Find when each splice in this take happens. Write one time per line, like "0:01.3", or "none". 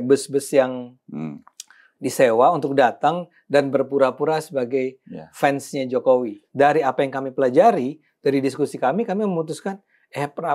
0:06.4